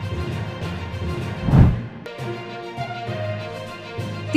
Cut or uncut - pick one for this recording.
cut